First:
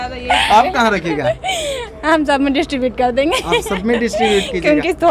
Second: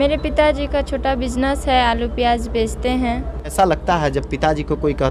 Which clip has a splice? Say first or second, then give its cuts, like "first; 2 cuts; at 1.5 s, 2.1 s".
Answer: second; 1 cut; at 3.5 s